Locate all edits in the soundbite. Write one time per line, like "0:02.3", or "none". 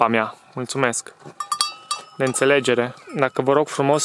0:03.0